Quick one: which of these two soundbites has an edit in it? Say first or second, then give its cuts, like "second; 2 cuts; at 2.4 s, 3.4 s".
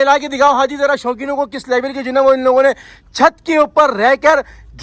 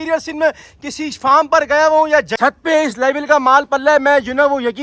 second; 1 cut; at 2.3 s